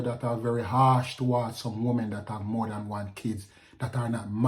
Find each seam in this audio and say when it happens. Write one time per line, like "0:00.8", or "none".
none